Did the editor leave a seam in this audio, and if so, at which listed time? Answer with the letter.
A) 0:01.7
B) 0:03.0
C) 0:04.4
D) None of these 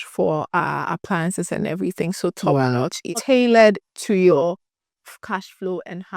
B